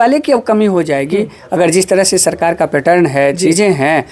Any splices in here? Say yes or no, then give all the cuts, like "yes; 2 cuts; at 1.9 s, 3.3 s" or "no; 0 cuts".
no; 0 cuts